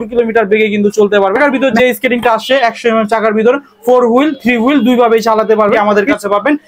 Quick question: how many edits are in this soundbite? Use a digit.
2